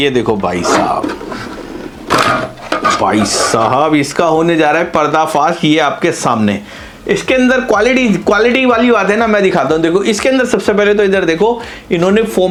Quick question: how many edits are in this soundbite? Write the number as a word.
zero